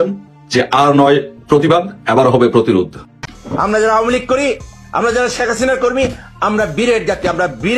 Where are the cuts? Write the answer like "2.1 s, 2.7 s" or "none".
2.9 s